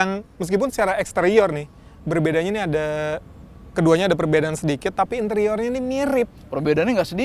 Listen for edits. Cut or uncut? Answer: uncut